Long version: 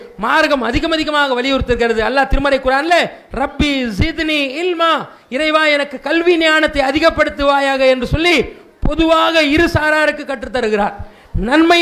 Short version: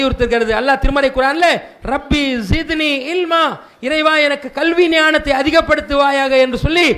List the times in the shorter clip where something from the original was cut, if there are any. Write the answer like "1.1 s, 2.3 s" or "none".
none